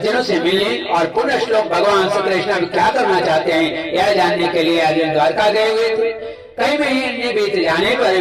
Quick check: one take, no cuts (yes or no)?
yes